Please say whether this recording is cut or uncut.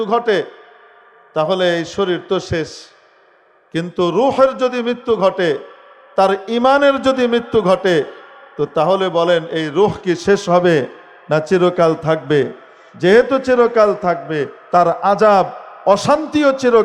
uncut